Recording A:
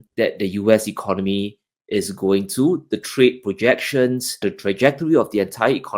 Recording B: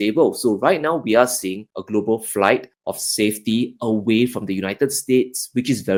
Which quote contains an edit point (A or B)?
A